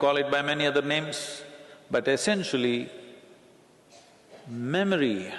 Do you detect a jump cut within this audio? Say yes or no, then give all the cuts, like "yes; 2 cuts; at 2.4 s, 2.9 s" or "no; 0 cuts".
no; 0 cuts